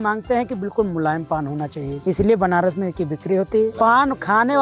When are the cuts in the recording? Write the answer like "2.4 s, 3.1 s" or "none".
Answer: 1.9 s, 3.7 s